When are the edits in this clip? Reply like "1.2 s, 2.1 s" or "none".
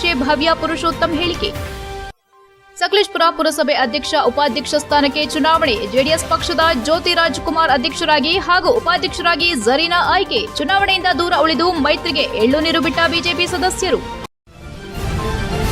14.2 s